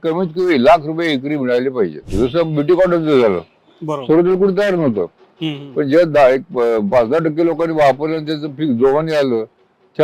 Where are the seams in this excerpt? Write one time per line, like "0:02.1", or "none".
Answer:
0:02.1